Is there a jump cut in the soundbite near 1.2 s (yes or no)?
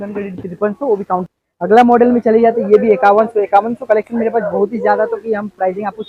yes